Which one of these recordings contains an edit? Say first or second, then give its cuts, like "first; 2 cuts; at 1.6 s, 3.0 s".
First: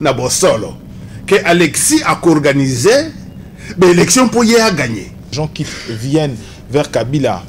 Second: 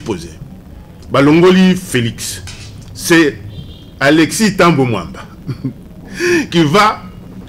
first; 1 cut; at 5.3 s